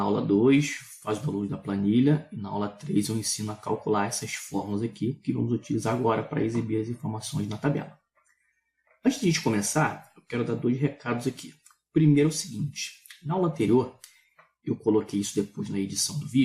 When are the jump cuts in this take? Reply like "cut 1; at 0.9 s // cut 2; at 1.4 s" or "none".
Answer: none